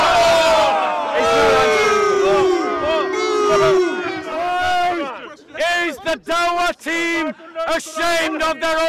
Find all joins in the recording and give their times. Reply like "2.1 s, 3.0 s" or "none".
4.3 s